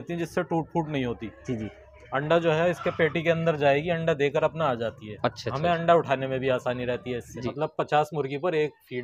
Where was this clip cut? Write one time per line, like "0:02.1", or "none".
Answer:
0:07.4